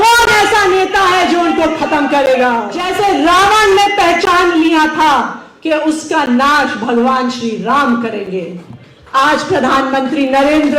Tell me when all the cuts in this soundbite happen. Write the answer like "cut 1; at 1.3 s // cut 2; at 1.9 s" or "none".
cut 1; at 2.8 s